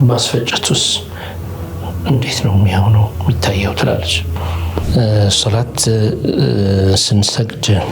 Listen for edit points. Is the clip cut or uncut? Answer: cut